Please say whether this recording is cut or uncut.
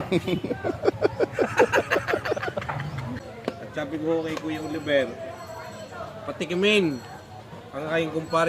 cut